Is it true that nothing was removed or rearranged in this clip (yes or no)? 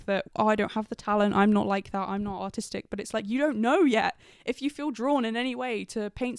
yes